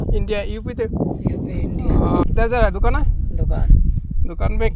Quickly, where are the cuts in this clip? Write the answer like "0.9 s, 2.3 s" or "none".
2.2 s